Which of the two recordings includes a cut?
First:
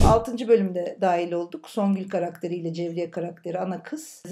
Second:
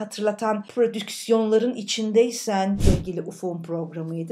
second; 1 cut; at 2.8 s

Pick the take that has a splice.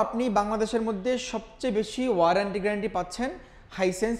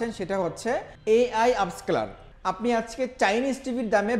second; 2 cuts; at 0.9 s, 2.2 s

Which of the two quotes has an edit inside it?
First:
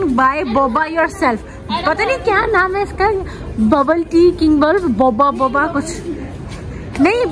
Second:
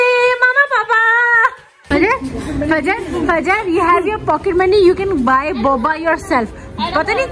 second; 1 cut; at 1.7 s

